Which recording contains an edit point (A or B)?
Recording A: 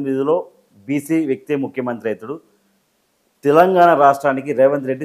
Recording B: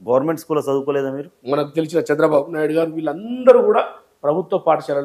B